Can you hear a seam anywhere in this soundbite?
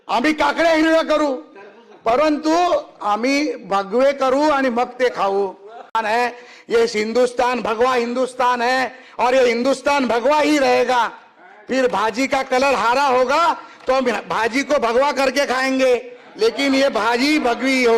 yes; 1 cut; at 5.9 s

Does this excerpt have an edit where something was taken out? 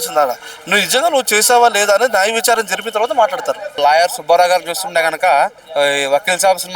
yes; 2 cuts; at 3.8 s, 5.6 s

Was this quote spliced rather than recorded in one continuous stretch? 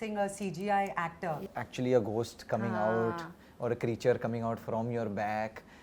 yes; 1 cut; at 1.6 s

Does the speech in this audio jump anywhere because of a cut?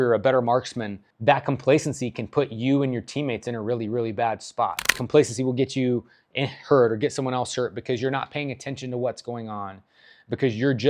yes; 2 cuts; at 1.1 s, 5.0 s

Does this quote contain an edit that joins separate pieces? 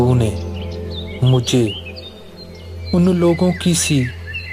no; 0 cuts

